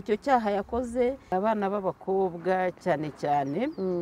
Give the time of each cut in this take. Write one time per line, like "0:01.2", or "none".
0:01.3

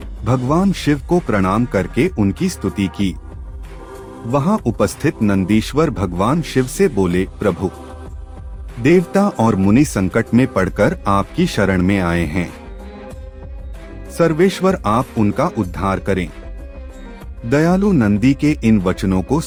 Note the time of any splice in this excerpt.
none

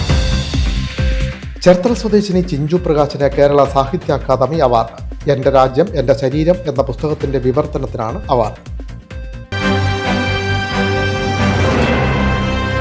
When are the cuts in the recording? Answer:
0:01.4
0:09.4

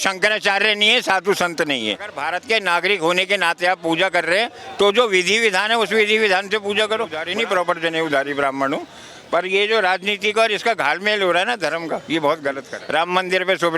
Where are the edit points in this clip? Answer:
0:02.2
0:07.1
0:12.7

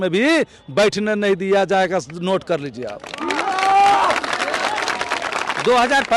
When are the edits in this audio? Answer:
none

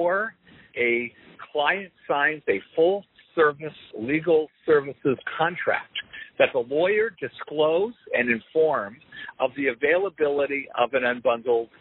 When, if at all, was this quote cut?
none

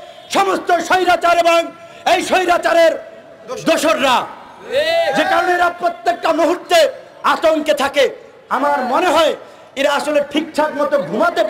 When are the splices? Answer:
none

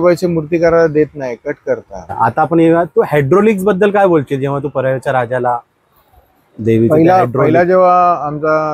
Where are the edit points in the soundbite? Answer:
0:02.1

